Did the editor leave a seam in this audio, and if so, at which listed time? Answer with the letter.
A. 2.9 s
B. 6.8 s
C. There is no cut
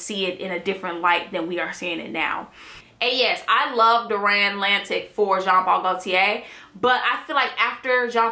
A